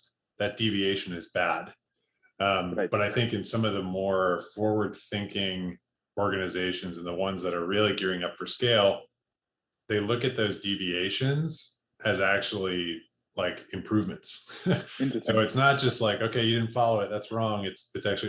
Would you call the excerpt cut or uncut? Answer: uncut